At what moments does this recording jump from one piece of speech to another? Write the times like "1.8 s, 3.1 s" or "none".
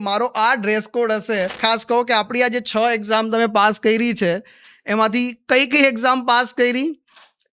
1.6 s